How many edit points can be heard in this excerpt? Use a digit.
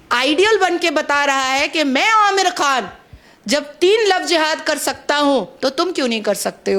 0